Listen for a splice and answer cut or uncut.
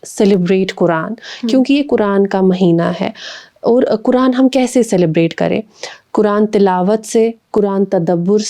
uncut